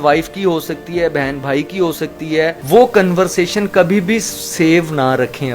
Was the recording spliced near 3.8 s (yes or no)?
no